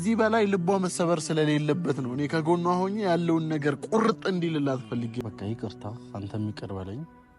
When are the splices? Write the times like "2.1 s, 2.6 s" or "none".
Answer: 5.1 s